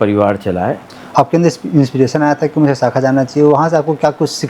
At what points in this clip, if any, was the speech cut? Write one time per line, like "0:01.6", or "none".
0:00.9